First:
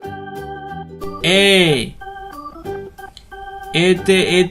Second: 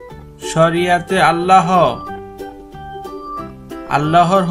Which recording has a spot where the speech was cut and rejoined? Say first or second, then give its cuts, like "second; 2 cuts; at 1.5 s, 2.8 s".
first; 3 cuts; at 0.8 s, 2.1 s, 3.7 s